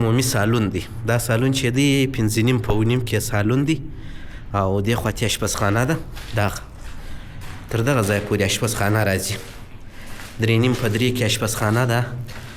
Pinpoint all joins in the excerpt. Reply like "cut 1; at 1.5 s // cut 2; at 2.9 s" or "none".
none